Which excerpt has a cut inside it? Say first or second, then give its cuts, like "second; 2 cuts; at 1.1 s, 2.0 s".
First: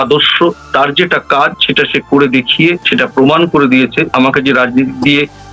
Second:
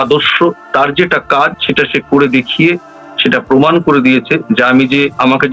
first; 2 cuts; at 2.8 s, 4.1 s